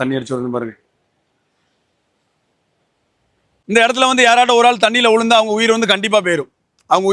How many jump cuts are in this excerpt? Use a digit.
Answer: 1